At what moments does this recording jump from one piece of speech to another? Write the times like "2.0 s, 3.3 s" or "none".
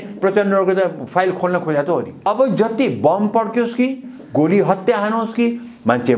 2.3 s